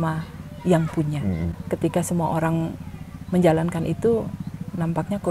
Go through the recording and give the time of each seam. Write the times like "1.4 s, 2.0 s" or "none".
1.6 s